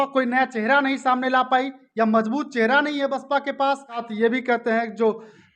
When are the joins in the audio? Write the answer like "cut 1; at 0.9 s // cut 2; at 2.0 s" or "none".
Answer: cut 1; at 4.1 s